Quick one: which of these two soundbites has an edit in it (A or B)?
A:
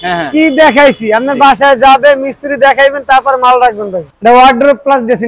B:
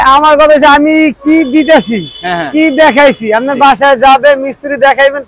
A